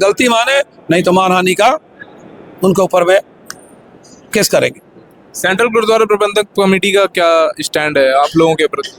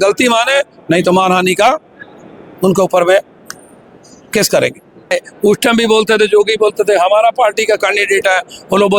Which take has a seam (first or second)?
second